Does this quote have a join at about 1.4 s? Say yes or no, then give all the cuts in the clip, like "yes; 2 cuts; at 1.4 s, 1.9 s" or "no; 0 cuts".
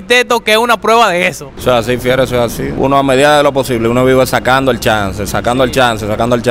no; 0 cuts